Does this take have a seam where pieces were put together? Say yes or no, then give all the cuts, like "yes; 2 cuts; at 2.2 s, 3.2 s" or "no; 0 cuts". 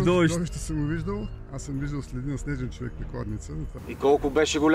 yes; 2 cuts; at 1.5 s, 3.8 s